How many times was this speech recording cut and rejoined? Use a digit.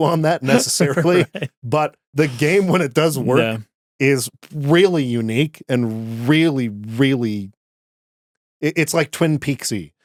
0